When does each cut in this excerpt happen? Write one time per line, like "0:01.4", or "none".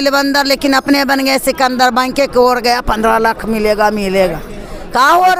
none